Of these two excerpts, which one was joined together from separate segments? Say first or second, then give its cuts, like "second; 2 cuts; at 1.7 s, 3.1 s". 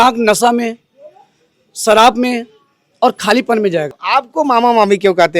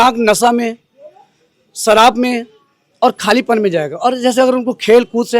first; 1 cut; at 3.9 s